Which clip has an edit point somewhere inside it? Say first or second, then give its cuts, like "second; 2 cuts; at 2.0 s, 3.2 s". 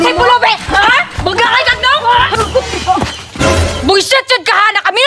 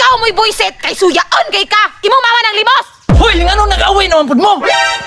first; 1 cut; at 2.3 s